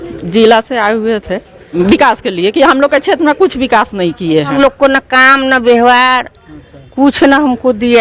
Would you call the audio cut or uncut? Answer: cut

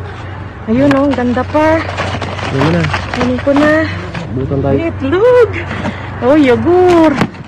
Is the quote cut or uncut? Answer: cut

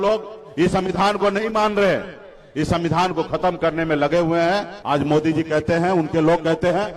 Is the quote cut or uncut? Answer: cut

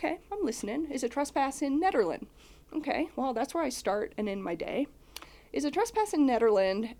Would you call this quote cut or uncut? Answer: uncut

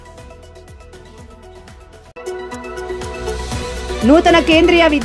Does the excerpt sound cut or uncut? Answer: uncut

